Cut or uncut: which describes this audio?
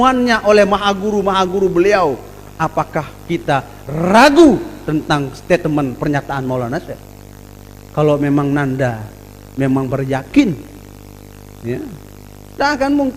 uncut